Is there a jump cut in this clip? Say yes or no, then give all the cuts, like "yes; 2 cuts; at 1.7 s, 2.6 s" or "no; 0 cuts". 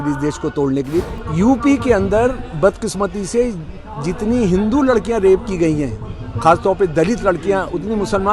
yes; 1 cut; at 1.1 s